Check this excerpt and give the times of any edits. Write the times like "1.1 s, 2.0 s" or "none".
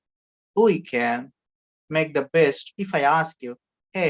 2.7 s